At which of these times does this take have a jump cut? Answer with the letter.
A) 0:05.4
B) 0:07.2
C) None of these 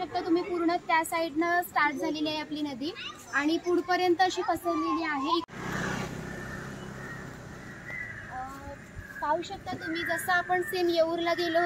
A